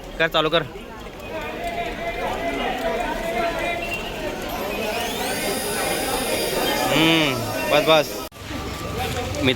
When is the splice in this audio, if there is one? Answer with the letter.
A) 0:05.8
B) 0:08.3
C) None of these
B